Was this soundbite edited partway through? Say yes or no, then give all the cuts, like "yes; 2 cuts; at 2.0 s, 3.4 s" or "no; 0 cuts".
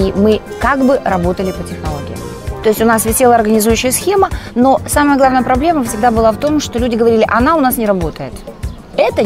yes; 1 cut; at 2.4 s